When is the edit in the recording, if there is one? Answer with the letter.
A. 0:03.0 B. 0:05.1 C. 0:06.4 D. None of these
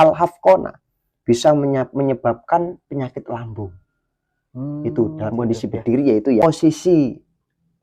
C